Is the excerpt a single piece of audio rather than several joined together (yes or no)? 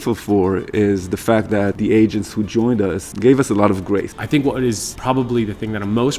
no